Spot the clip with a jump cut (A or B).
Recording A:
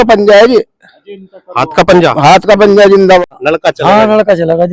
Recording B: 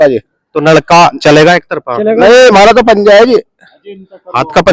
A